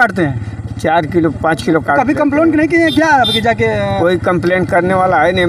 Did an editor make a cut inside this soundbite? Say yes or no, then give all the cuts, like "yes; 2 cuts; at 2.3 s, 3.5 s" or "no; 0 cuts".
no; 0 cuts